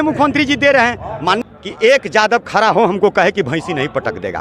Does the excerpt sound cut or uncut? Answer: cut